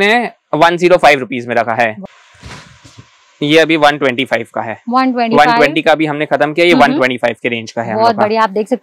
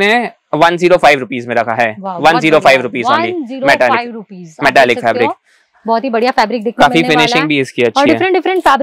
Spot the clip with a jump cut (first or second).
first